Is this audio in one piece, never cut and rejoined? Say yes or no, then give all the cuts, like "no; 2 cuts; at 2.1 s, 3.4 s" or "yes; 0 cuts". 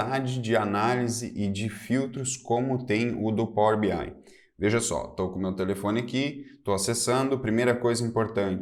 yes; 0 cuts